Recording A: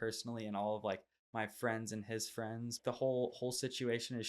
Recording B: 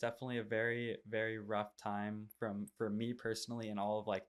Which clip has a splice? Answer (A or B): A